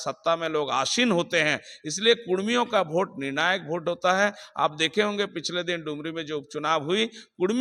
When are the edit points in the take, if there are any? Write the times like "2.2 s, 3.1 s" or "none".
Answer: none